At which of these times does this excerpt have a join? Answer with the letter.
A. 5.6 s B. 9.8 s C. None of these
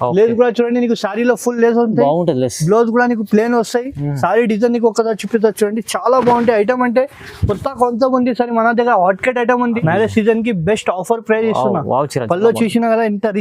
B